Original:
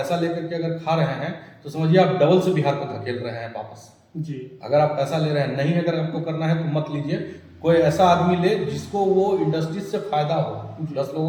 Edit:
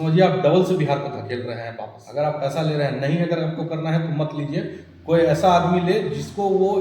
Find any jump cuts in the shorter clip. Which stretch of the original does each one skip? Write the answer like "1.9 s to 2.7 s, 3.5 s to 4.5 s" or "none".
3.7 s to 4.5 s